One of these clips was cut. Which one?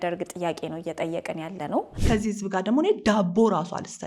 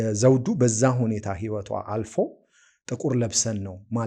first; 1 cut; at 2.0 s

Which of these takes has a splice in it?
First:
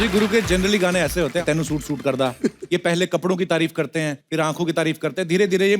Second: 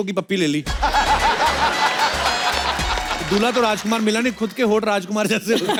first; 2 cuts; at 1.4 s, 4.2 s

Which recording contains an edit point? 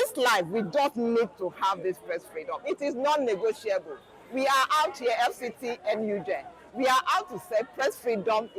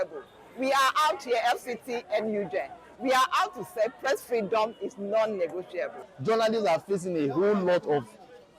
second; 1 cut; at 6.1 s

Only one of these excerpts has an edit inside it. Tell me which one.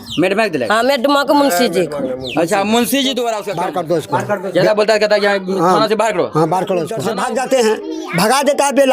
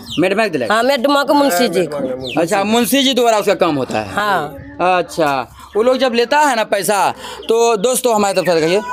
first; 2 cuts; at 3.5 s, 7.0 s

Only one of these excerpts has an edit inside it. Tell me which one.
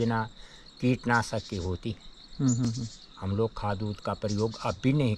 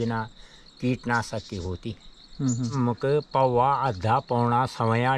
second; 1 cut; at 2.7 s

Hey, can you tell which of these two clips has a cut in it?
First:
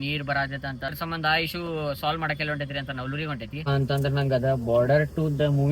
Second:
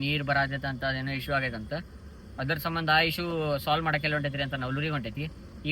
first; 2 cuts; at 0.9 s, 3.7 s

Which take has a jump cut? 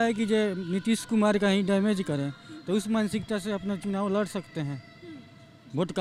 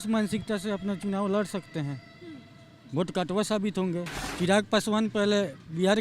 second; 1 cut; at 4.2 s

